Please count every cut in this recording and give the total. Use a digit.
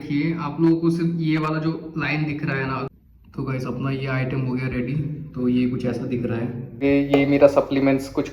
2